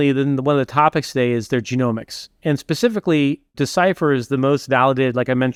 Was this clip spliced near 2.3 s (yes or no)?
no